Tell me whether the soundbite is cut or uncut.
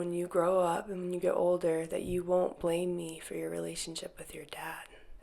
uncut